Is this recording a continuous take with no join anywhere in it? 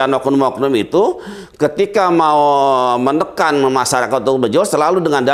yes; 0 cuts

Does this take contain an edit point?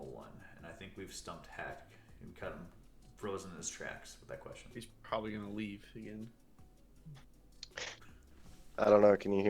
no; 0 cuts

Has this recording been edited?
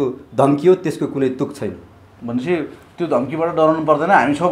no; 0 cuts

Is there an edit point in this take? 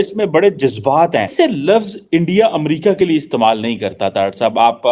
yes; 1 cut; at 1.3 s

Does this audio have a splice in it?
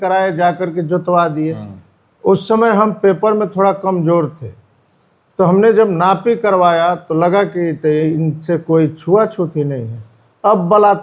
no; 0 cuts

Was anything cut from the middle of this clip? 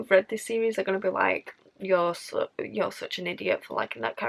no; 0 cuts

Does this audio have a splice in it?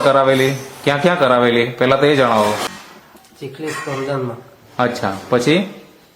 yes; 1 cut; at 2.7 s

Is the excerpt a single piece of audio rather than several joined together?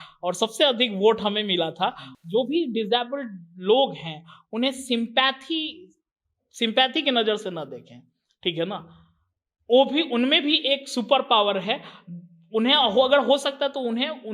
no; 1 cut; at 2.1 s

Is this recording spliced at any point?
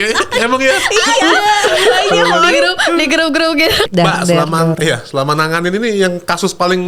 yes; 1 cut; at 3.9 s

